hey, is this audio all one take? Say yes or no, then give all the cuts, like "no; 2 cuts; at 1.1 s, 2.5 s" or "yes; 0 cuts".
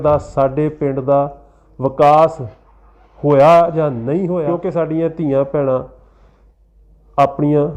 no; 1 cut; at 4.5 s